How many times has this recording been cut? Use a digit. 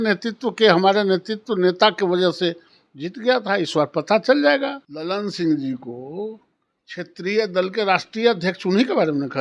1